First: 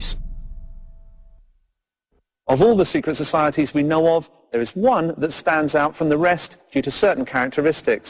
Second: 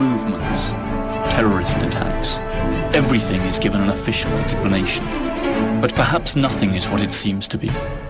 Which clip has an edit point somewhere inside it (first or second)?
second